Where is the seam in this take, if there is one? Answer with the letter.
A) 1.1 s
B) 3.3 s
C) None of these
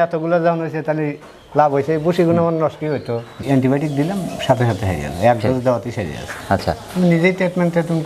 B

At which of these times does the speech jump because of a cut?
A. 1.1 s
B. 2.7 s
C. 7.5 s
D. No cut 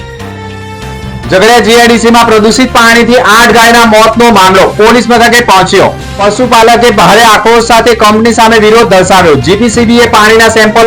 A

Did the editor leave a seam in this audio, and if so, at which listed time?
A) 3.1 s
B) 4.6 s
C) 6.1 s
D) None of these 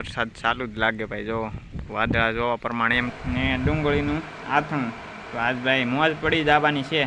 A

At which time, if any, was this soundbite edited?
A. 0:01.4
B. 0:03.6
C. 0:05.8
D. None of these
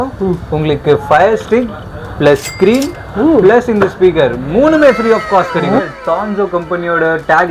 C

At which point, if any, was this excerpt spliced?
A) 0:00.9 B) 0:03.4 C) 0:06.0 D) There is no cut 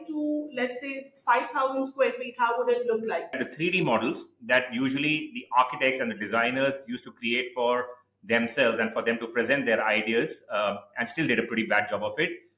B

